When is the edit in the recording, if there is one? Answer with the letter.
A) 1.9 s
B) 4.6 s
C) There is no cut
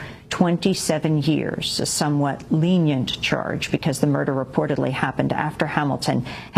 A